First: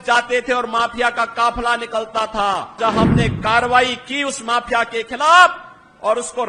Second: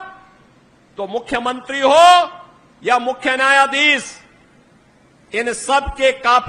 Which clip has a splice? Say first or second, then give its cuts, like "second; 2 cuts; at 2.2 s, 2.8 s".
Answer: first; 1 cut; at 2.8 s